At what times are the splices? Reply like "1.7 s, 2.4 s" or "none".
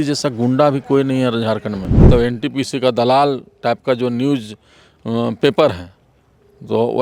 1.9 s